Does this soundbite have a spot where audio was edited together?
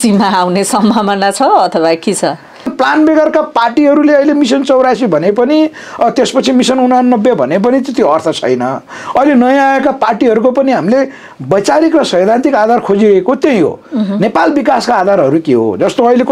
yes; 1 cut; at 2.7 s

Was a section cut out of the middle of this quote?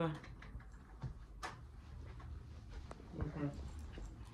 no; 0 cuts

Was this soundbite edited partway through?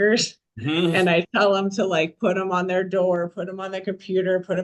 no; 0 cuts

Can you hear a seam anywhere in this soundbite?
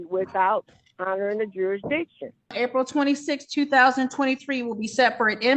yes; 1 cut; at 2.5 s

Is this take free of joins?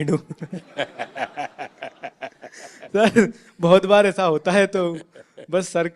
yes; 0 cuts

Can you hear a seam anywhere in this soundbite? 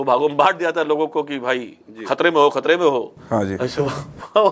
no; 0 cuts

